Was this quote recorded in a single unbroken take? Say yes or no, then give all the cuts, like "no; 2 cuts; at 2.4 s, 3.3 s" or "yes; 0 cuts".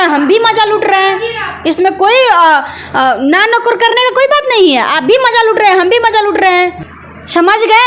no; 1 cut; at 6.9 s